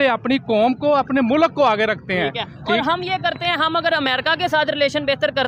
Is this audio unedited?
yes; 0 cuts

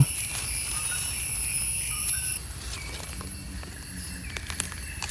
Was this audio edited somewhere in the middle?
yes; 1 cut; at 2.4 s

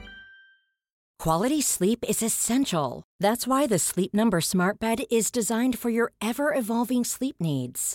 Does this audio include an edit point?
yes; 1 cut; at 1.0 s

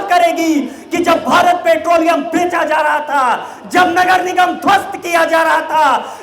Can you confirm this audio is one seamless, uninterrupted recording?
yes; 0 cuts

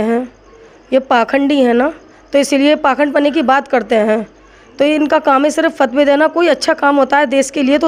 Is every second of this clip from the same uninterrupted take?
yes; 0 cuts

